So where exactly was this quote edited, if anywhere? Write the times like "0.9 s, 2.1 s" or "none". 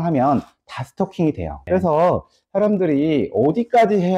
1.6 s